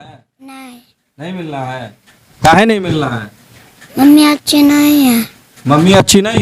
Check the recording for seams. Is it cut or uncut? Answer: uncut